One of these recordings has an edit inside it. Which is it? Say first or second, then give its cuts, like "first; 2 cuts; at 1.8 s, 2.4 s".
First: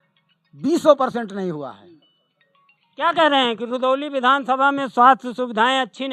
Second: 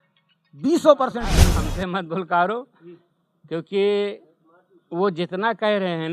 second; 1 cut; at 1.7 s